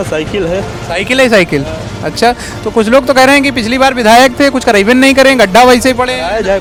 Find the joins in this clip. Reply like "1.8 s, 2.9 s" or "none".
none